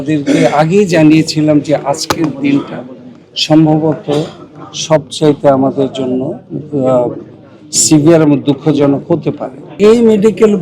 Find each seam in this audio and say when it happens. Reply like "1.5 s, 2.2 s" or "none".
9.7 s